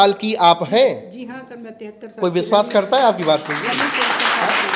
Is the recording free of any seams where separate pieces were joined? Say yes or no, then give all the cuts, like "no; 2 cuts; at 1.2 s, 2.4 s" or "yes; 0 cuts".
yes; 0 cuts